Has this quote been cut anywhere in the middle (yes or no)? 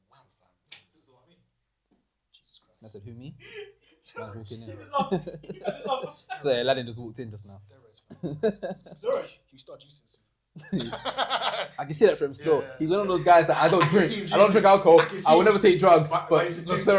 no